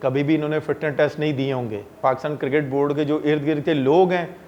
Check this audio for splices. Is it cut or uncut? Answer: cut